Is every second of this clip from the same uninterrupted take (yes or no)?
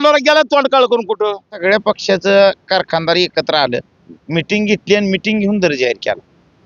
no